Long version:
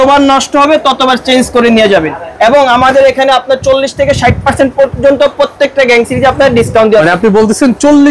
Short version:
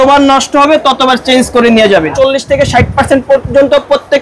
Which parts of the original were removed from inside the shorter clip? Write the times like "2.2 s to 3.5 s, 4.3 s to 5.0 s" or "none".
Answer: 2.1 s to 3.6 s